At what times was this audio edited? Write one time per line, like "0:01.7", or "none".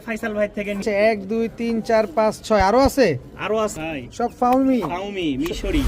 0:00.8
0:03.7